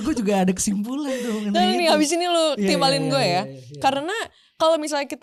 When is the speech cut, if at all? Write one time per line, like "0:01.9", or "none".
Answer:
none

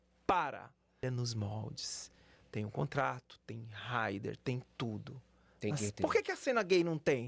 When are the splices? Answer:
0:01.0

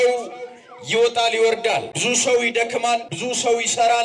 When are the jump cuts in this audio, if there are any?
0:01.9
0:03.1

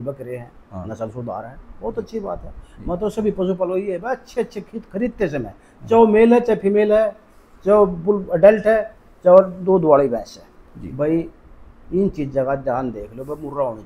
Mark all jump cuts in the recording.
none

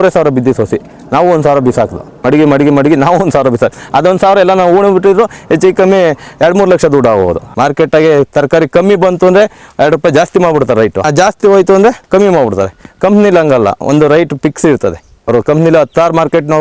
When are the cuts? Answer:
0:02.1
0:07.5
0:11.1
0:15.1

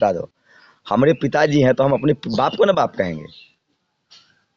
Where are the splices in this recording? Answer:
none

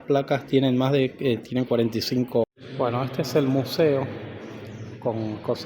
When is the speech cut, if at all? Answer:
0:02.4

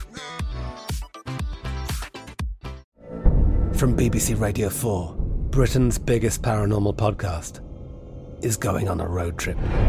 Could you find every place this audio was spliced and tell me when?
0:02.9

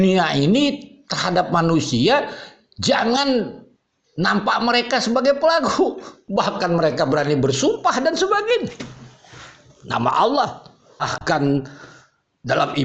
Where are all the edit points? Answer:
0:11.1

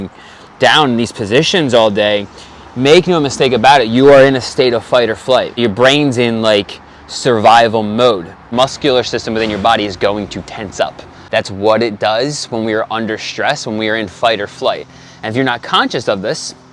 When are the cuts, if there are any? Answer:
0:05.5
0:08.5
0:11.1

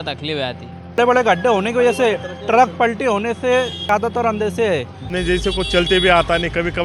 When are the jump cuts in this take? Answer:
0:01.0
0:03.9
0:05.0

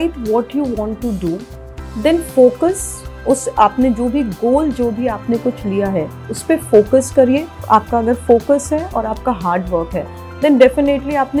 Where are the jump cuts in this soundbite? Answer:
0:07.6

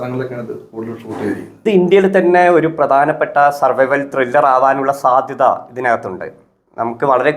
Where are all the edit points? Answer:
0:01.6

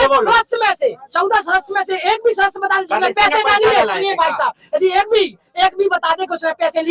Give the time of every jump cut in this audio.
none

